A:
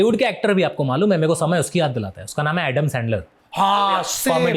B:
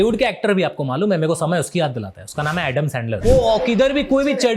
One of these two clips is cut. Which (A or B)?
B